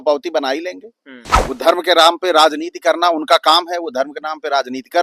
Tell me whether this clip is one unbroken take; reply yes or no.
no